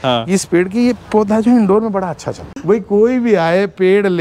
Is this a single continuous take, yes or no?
no